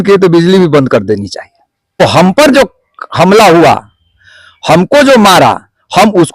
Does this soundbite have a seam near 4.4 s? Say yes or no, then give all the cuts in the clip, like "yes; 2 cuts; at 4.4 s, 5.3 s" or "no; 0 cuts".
no; 1 cut; at 2.0 s